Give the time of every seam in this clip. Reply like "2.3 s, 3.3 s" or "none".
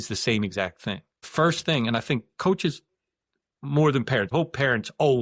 1.1 s, 4.3 s